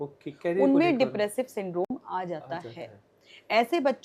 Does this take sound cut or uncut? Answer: uncut